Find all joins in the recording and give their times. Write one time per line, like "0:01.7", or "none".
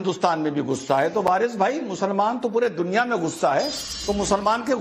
none